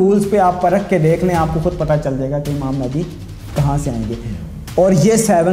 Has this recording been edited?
no; 0 cuts

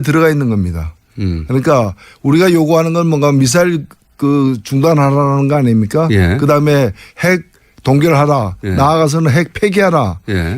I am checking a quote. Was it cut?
yes; 1 cut; at 6.7 s

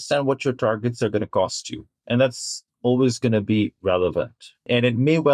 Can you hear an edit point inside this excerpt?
yes; 2 cuts; at 2.0 s, 4.5 s

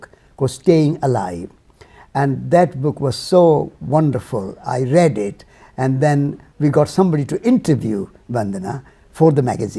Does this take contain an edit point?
no; 0 cuts

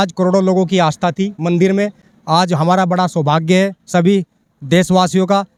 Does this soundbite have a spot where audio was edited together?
no; 0 cuts

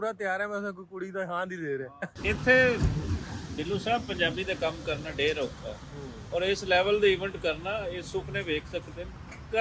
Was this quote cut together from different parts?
yes; 1 cut; at 2.0 s

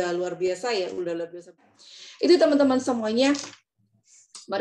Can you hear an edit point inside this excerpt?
yes; 1 cut; at 1.7 s

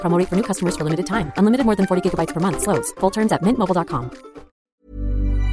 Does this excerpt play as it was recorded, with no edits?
no; 1 cut; at 4.6 s

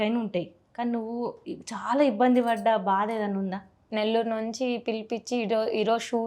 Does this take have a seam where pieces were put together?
yes; 1 cut; at 3.9 s

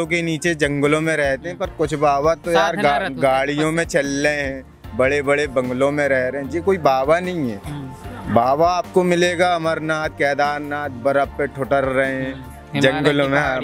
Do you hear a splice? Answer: no; 0 cuts

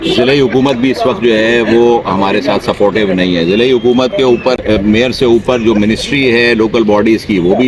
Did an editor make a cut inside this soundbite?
yes; 1 cut; at 4.6 s

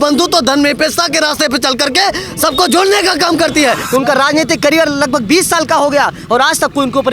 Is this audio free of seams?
no; 1 cut; at 3.8 s

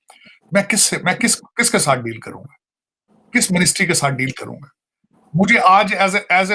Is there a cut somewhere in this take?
no; 0 cuts

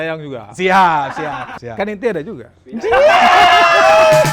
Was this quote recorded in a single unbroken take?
no; 1 cut; at 1.5 s

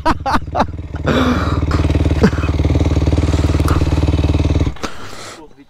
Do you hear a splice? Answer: yes; 1 cut; at 1.7 s

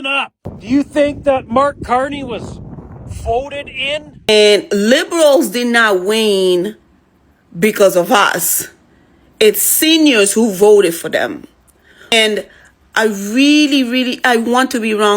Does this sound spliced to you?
yes; 2 cuts; at 4.3 s, 12.1 s

